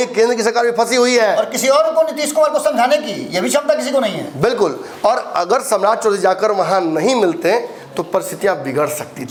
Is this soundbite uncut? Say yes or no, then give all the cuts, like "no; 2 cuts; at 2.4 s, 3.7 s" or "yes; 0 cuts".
yes; 0 cuts